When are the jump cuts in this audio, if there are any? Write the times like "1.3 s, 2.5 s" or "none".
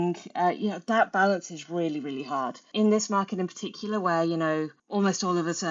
2.7 s, 4.8 s

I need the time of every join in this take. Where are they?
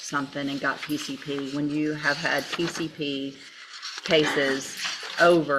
none

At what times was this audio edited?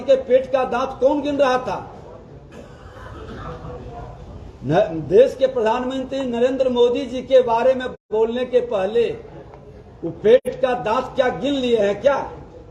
none

